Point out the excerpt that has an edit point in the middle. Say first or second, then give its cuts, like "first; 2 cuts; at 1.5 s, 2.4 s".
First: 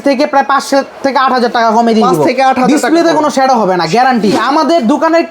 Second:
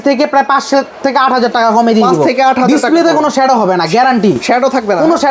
first; 1 cut; at 4.4 s